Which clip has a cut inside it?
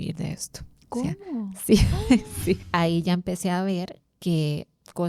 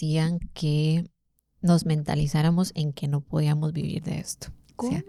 first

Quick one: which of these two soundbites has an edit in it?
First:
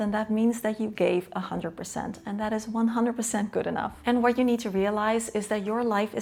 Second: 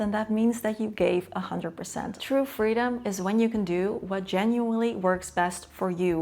second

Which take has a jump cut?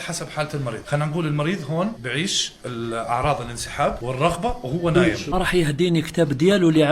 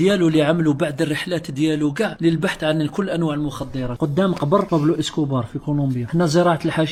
first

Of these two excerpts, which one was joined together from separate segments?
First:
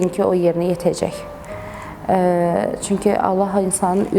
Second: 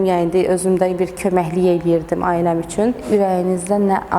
second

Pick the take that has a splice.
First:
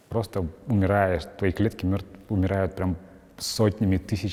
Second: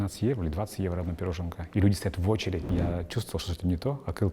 second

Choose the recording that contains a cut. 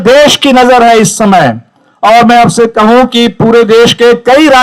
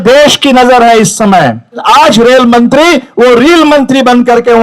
second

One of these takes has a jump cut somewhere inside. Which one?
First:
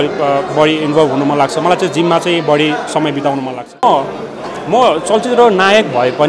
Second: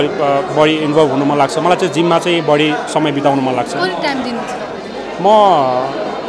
first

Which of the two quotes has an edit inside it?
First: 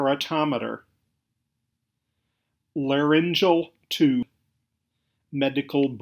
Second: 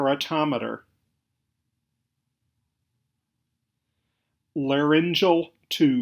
first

